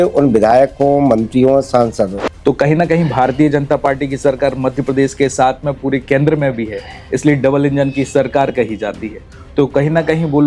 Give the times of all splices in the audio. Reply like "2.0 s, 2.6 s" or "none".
2.3 s